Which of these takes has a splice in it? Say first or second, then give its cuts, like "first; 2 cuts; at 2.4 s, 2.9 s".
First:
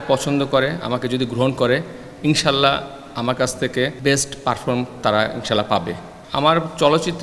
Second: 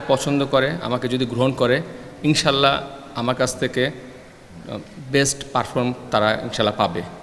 first; 2 cuts; at 4.0 s, 6.1 s